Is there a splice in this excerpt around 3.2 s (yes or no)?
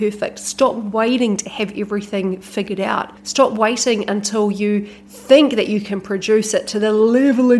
yes